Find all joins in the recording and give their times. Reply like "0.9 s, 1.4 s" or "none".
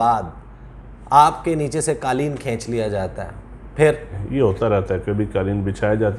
4.2 s